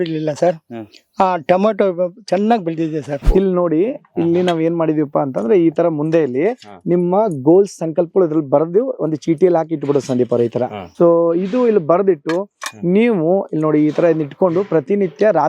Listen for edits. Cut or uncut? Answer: cut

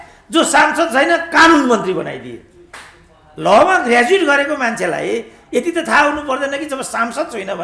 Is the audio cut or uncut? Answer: uncut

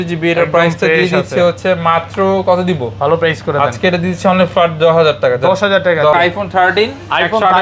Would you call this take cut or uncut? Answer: cut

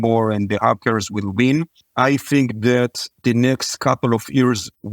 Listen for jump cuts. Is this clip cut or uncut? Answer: cut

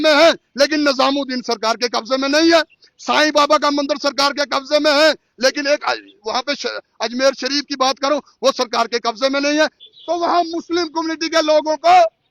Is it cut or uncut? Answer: cut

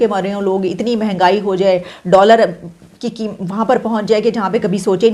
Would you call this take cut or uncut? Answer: uncut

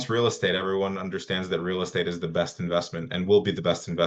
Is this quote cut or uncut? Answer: uncut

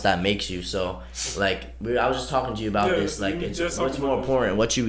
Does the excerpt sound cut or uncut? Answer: uncut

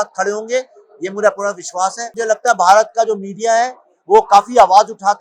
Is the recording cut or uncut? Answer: cut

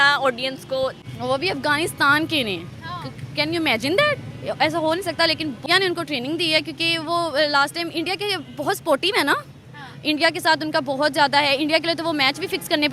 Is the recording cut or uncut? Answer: cut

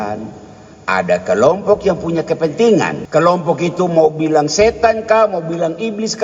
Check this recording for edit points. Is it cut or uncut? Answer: cut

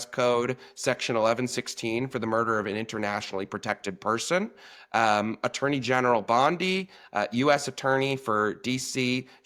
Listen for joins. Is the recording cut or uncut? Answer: uncut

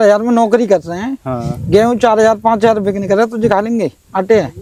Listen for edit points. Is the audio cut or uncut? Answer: uncut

